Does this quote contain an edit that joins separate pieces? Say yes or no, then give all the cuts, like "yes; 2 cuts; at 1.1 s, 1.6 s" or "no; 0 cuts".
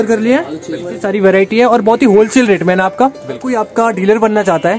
yes; 2 cuts; at 1.0 s, 3.5 s